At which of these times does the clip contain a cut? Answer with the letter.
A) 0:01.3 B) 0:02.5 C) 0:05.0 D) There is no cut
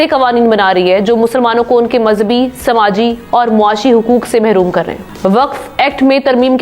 C